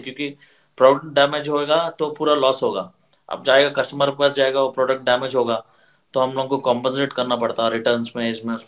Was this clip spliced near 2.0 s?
no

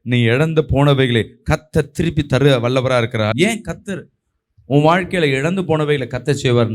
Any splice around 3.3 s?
yes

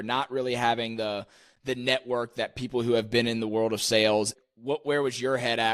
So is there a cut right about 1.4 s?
no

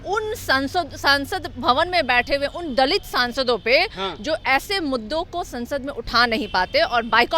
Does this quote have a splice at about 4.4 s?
no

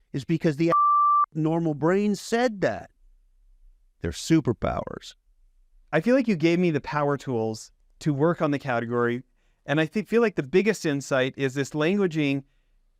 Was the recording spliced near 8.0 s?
no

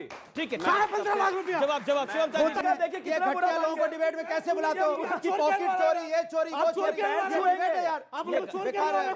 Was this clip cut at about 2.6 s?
yes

